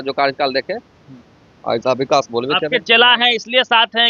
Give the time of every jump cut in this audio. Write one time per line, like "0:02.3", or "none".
none